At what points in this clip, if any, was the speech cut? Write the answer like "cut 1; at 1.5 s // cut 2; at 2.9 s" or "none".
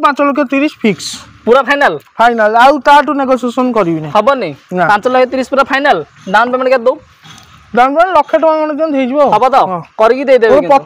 none